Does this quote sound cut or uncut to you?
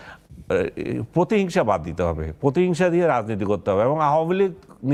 uncut